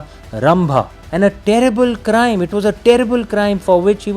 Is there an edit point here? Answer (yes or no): yes